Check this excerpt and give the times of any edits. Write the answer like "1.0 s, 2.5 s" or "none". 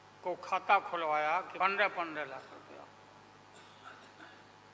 1.5 s